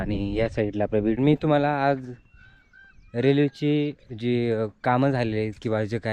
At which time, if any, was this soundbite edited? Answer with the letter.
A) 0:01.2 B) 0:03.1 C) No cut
A